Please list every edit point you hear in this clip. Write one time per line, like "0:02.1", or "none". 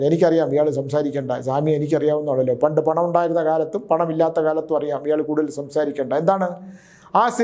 none